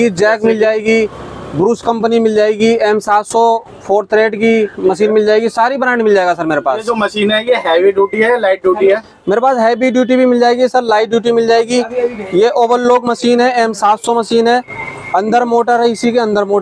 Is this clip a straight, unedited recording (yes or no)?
yes